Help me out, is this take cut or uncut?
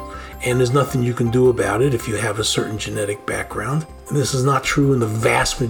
cut